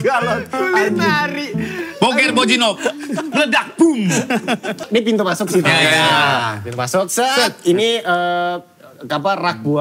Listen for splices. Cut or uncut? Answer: cut